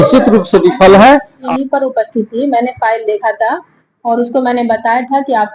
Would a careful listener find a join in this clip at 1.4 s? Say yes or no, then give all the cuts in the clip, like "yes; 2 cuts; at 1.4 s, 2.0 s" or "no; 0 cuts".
yes; 1 cut; at 1.4 s